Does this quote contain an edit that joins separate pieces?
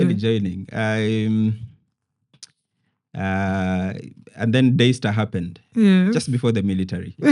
no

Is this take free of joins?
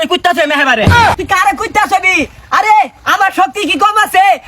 no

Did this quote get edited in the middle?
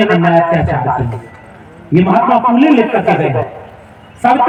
no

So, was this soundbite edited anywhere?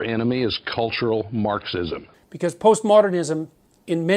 yes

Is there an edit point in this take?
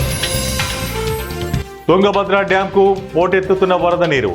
yes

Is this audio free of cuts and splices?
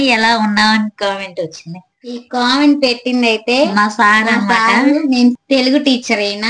no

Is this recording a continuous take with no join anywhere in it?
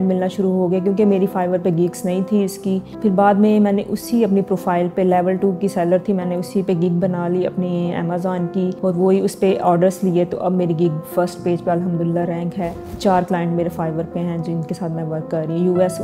no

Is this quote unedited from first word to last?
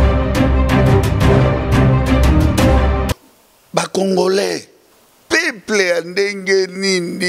no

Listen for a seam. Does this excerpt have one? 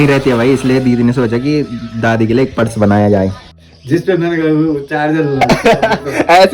yes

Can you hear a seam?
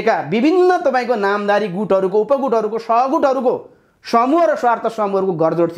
no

